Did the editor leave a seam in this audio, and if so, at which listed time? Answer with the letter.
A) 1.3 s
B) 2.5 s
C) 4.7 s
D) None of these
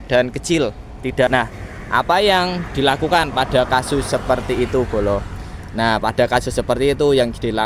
A